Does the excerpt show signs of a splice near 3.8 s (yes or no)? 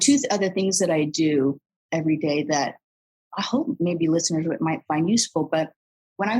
yes